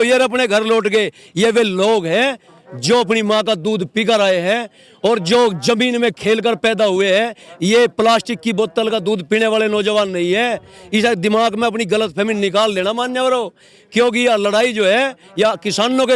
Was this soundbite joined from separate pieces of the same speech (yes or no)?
no